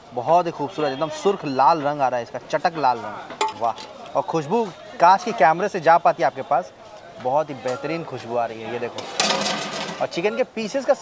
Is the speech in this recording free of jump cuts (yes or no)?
no